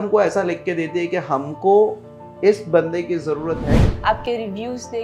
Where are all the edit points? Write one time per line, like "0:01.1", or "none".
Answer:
0:03.8